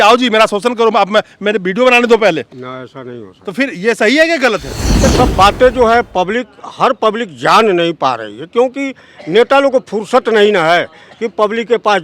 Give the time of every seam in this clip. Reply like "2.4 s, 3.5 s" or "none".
5.1 s